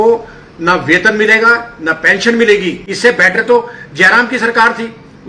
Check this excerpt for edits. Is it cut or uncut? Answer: cut